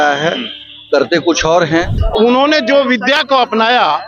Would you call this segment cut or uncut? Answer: cut